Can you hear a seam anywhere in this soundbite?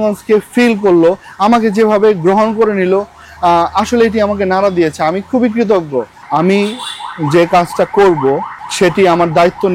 yes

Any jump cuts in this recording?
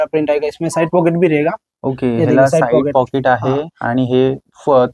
no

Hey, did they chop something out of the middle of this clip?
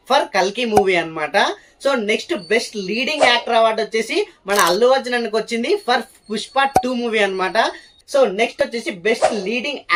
no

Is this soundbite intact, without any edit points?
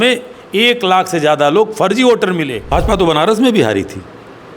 no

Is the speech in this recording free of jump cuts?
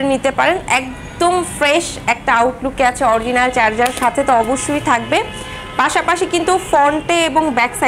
yes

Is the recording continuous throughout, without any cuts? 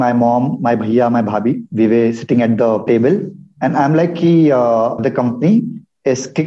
no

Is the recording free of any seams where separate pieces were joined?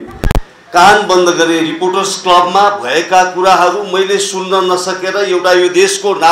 yes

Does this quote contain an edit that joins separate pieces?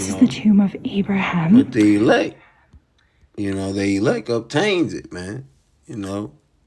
no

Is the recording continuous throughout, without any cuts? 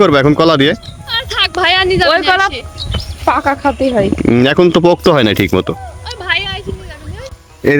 yes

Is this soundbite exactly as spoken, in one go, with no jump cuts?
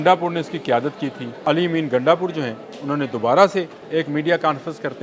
no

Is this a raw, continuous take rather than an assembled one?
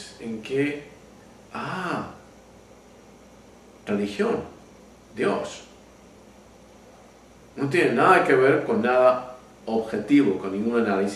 yes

